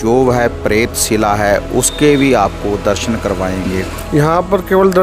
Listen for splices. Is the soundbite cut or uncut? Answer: cut